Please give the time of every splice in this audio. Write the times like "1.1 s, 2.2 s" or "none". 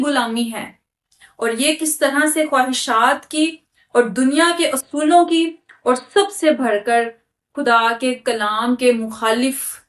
none